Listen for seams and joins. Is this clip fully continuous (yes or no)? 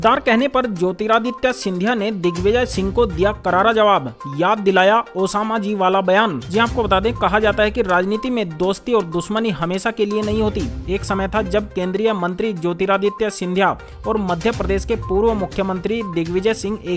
yes